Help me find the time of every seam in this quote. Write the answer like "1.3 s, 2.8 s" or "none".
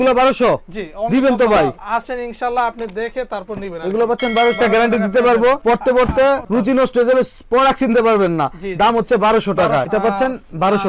1.8 s, 4.6 s, 9.9 s